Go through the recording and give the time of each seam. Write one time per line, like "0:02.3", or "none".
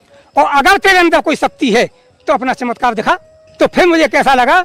0:03.4